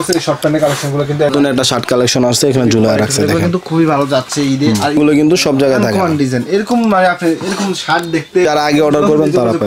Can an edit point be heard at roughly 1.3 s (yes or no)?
yes